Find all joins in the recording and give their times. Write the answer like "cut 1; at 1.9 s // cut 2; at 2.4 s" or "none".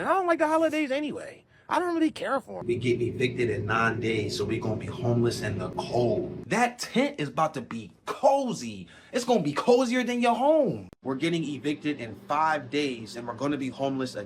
cut 1; at 2.5 s // cut 2; at 6.4 s // cut 3; at 10.9 s